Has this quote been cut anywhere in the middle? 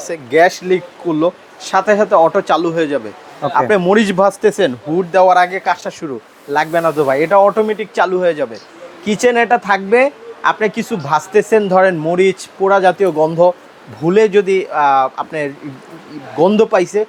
no; 0 cuts

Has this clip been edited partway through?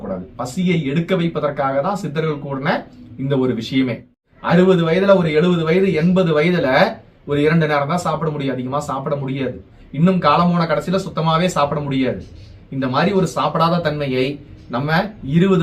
yes; 2 cuts; at 4.2 s, 9.8 s

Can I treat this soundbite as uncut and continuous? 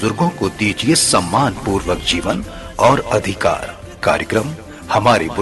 yes; 0 cuts

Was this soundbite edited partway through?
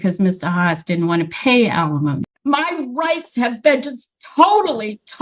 yes; 1 cut; at 2.3 s

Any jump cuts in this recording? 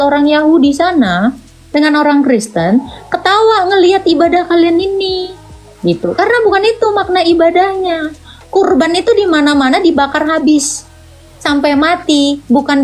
no; 0 cuts

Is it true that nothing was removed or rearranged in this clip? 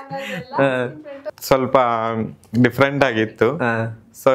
no; 1 cut; at 1.3 s

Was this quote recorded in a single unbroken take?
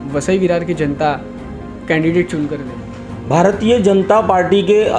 yes; 0 cuts

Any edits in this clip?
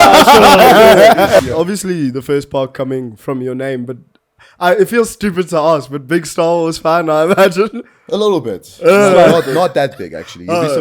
yes; 1 cut; at 1.4 s

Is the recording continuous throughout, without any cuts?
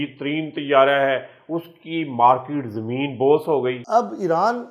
no; 1 cut; at 3.8 s

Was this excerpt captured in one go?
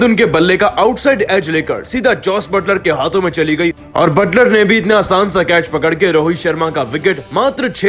yes; 0 cuts

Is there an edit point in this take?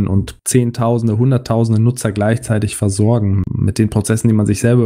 yes; 1 cut; at 3.5 s

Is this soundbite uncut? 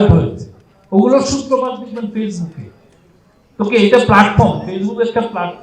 yes; 0 cuts

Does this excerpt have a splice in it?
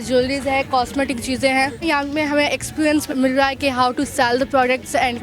yes; 1 cut; at 3.1 s

